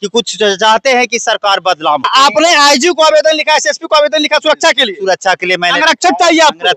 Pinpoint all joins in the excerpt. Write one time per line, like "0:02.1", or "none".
0:02.1